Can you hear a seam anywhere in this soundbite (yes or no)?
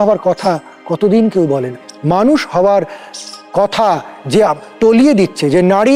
yes